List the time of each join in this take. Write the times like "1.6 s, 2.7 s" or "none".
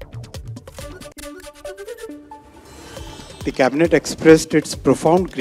1.1 s, 3.4 s